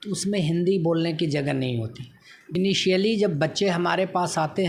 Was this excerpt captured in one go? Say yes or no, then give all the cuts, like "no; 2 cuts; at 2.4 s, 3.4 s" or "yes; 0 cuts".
no; 1 cut; at 2.6 s